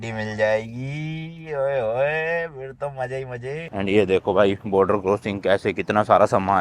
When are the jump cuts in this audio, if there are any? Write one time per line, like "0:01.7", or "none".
0:03.8